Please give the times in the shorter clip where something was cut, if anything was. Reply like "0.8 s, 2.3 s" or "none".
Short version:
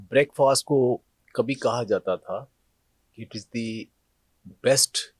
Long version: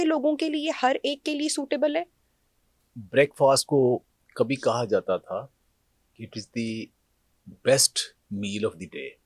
none